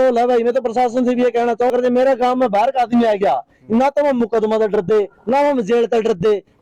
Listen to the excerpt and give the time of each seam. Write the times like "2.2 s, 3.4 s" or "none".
1.7 s